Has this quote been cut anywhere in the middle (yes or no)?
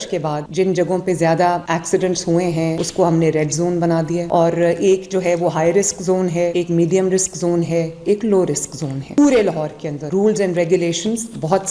yes